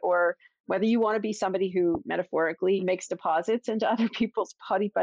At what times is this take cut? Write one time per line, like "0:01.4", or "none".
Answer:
0:02.8

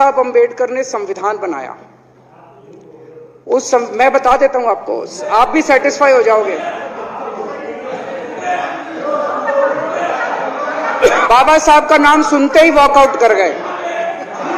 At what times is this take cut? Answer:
0:11.2

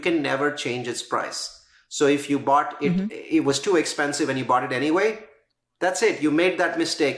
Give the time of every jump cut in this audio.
none

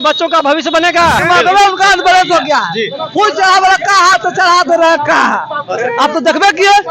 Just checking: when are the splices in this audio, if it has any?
0:01.2

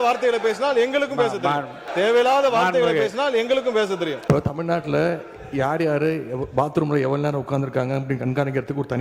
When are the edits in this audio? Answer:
0:01.8
0:04.2

